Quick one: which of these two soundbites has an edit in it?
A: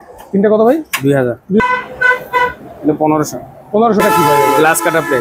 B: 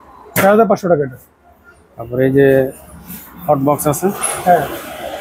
A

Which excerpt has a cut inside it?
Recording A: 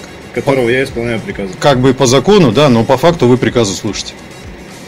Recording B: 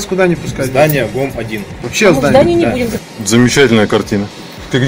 B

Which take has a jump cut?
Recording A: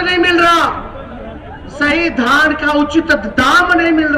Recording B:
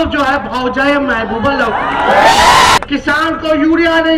B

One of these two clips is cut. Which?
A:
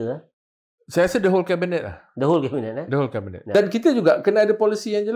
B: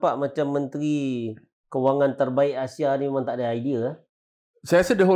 A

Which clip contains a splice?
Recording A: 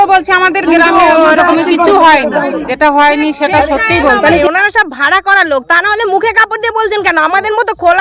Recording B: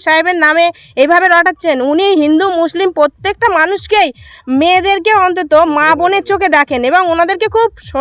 A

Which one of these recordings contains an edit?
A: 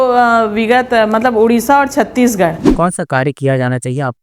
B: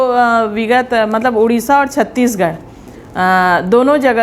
A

